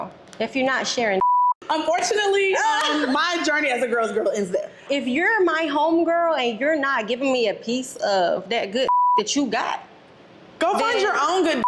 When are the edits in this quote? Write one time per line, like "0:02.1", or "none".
0:01.6
0:04.8